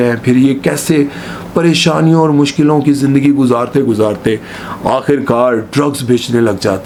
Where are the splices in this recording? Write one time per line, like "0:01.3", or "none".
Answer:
none